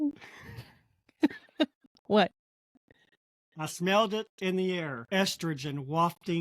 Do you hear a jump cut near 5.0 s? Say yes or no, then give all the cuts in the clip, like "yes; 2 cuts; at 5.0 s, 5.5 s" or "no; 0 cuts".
yes; 1 cut; at 5.0 s